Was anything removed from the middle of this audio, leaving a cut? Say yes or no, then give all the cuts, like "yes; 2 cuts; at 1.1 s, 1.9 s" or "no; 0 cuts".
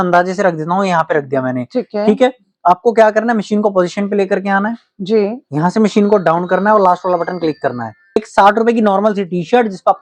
yes; 1 cut; at 8.0 s